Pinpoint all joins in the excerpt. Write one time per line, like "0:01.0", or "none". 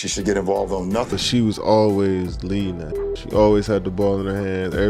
0:01.1